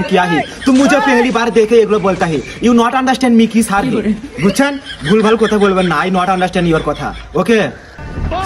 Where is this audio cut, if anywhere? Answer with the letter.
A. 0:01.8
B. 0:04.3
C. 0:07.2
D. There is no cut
D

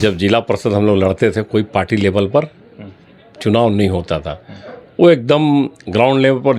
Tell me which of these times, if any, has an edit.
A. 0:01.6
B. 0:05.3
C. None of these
C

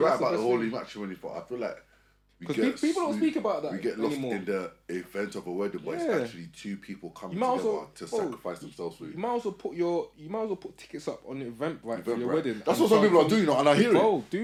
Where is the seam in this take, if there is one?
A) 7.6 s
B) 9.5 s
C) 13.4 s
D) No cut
D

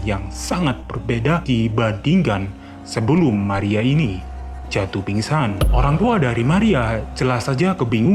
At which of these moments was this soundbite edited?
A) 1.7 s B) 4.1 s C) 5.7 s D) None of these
C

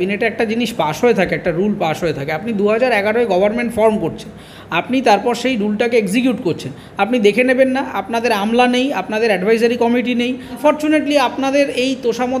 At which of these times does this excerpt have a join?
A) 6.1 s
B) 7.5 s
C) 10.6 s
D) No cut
C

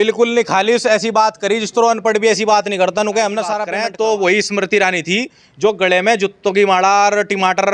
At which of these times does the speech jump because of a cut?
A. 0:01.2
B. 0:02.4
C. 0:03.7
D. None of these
C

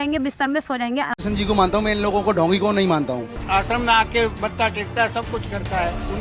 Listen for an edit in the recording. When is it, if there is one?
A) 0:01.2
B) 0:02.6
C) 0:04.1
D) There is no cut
A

